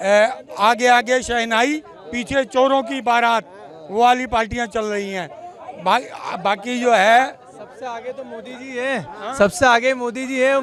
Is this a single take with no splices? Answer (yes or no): yes